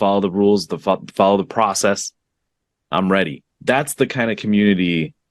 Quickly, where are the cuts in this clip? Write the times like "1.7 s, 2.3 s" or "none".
3.5 s